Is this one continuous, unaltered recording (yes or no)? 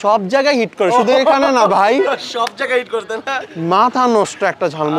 no